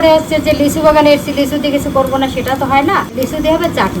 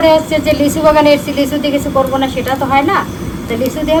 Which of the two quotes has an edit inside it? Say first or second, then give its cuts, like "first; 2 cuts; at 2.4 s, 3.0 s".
first; 1 cut; at 3.1 s